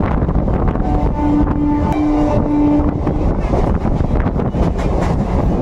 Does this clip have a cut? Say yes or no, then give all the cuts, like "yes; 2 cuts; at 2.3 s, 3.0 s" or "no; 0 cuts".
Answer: yes; 1 cut; at 1.9 s